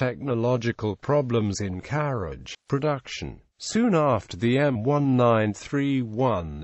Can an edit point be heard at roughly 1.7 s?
yes; 1 cut; at 1.7 s

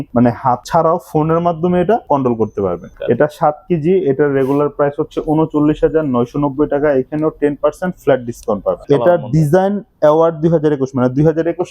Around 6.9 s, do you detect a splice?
no; 2 cuts; at 2.8 s, 8.8 s

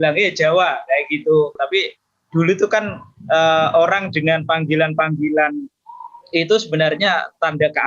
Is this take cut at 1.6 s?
yes; 1 cut; at 1.6 s

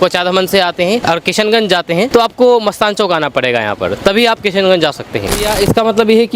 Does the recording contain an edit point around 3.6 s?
no; 3 cuts; at 1.0 s, 2.1 s, 5.3 s

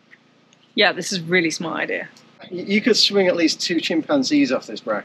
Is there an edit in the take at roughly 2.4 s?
yes; 1 cut; at 2.4 s

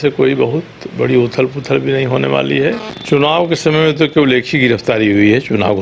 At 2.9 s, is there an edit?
yes; 1 cut; at 2.9 s

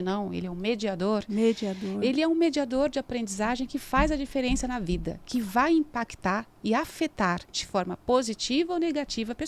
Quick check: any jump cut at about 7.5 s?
yes; 1 cut; at 7.5 s

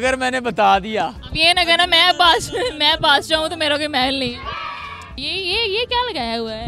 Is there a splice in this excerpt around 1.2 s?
yes; 2 cuts; at 1.2 s, 5.1 s

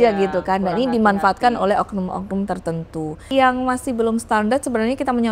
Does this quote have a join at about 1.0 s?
no; 1 cut; at 3.3 s

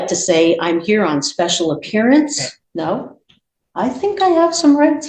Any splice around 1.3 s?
no; 1 cut; at 2.5 s

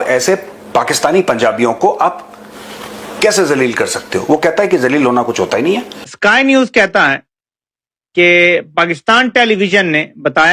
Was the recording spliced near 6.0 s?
yes; 1 cut; at 6.0 s

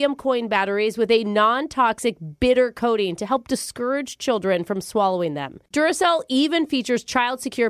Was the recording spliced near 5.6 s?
no; 0 cuts

